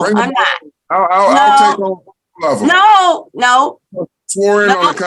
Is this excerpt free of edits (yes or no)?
yes